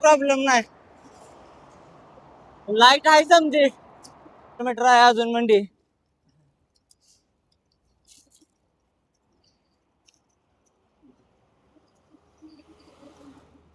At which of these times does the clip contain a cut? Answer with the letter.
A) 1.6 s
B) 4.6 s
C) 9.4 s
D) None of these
B